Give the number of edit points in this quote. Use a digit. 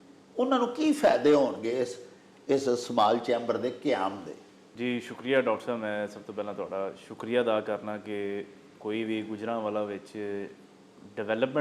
0